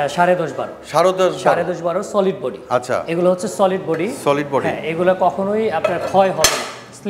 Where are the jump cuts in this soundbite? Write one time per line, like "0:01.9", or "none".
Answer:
none